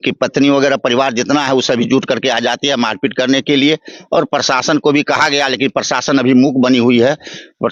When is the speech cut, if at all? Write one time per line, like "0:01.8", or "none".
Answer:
none